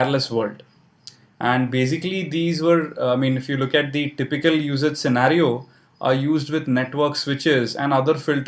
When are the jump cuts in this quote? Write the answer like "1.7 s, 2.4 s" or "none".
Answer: 4.2 s